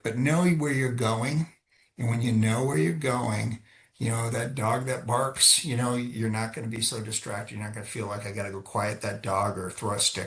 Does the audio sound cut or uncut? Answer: uncut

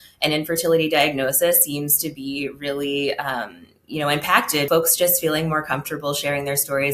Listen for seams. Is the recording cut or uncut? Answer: cut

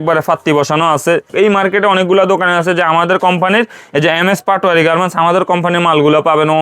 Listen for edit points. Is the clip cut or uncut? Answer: cut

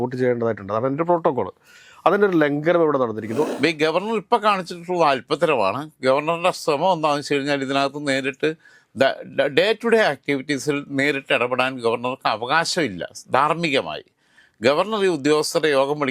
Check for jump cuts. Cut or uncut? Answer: cut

